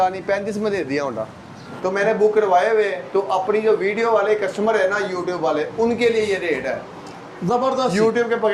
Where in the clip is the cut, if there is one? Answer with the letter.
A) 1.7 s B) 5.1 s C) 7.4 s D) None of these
A